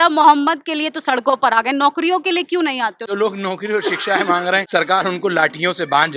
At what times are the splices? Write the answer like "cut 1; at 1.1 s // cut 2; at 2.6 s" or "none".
cut 1; at 3.1 s // cut 2; at 4.6 s